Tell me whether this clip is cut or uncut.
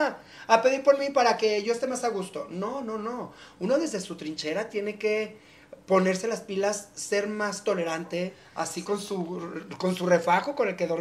cut